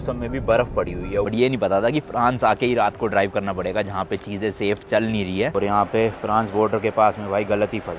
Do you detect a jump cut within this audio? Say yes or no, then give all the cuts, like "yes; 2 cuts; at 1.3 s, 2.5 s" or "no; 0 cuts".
yes; 2 cuts; at 1.3 s, 5.5 s